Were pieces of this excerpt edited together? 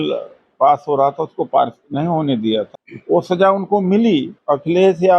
yes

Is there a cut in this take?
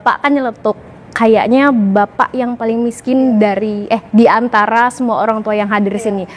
no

